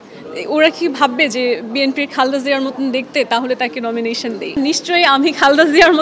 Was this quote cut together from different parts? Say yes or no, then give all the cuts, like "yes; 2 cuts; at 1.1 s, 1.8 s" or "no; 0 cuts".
yes; 1 cut; at 4.6 s